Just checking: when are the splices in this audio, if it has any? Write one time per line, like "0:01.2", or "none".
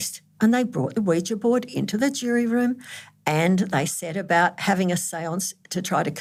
none